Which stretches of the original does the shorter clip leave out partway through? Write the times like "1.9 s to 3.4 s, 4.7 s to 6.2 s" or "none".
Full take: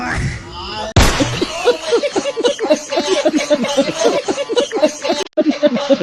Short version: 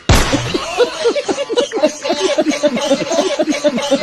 4.0 s to 5.1 s